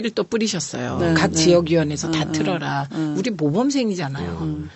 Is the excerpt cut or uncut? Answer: cut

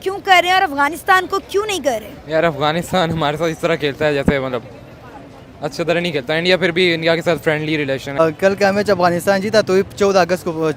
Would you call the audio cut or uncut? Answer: cut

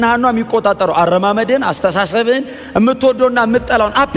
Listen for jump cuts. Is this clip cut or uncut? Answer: uncut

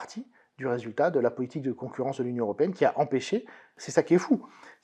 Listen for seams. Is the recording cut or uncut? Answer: cut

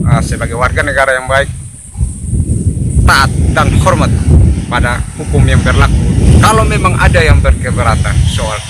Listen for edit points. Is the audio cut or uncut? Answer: cut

